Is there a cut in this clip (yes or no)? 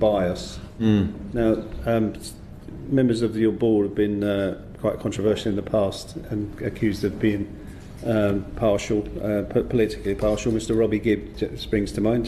no